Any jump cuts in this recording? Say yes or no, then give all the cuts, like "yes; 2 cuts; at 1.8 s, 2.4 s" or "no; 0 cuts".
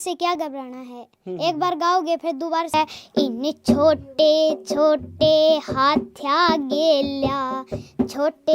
yes; 1 cut; at 2.7 s